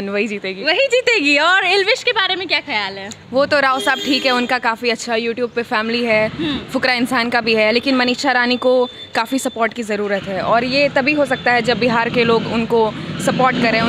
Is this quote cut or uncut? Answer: uncut